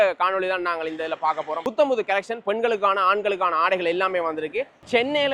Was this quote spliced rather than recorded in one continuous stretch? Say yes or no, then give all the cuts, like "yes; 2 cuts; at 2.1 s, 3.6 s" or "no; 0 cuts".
yes; 1 cut; at 1.6 s